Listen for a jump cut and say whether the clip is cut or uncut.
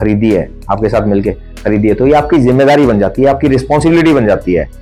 uncut